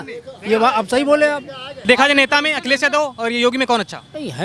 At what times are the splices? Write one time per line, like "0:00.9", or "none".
0:01.7